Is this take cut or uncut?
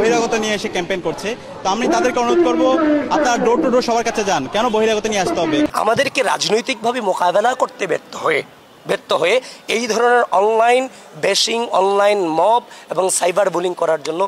cut